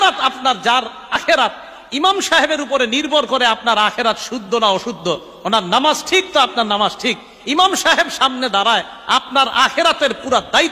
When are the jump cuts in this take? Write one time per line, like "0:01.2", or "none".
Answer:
0:01.2